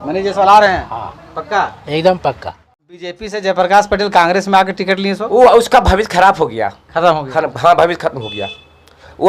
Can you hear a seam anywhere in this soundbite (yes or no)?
yes